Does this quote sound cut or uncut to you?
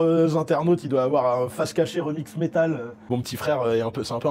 cut